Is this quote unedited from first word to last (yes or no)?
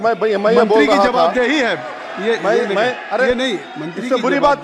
yes